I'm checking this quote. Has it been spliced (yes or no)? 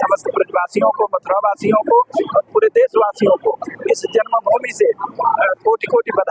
no